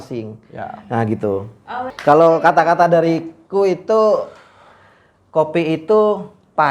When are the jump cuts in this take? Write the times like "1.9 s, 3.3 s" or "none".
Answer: 1.9 s